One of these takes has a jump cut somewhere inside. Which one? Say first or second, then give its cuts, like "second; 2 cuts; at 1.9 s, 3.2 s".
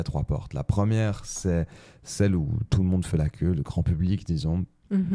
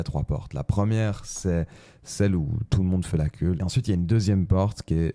second; 1 cut; at 3.6 s